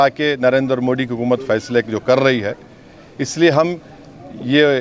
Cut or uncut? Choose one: uncut